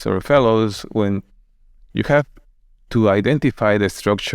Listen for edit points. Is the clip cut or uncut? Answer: uncut